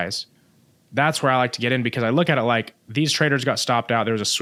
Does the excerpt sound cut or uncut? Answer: uncut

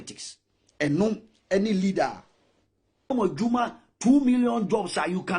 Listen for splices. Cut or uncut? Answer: cut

